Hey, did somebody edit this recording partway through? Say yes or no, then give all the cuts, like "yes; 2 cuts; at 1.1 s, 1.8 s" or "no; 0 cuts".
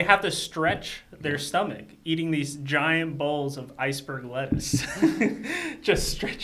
no; 0 cuts